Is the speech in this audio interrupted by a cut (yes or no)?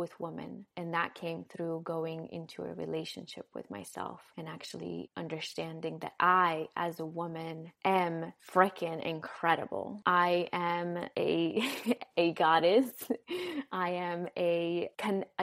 no